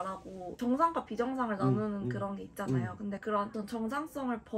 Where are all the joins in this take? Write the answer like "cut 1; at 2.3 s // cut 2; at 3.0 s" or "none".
none